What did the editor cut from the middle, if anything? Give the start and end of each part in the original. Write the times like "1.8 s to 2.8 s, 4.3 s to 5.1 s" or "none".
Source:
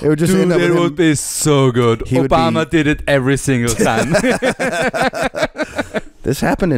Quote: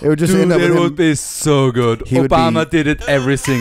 none